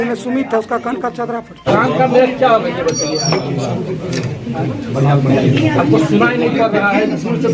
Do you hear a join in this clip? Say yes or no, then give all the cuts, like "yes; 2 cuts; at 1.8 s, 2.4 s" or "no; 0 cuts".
yes; 1 cut; at 1.5 s